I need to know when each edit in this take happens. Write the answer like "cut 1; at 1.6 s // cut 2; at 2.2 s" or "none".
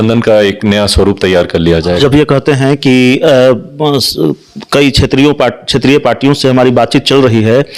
cut 1; at 2.0 s